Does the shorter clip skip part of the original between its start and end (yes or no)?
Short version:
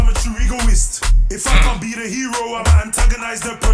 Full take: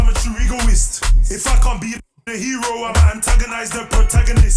yes